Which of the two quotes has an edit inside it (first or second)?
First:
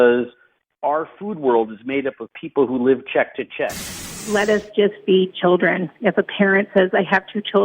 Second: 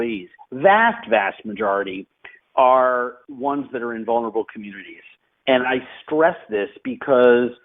first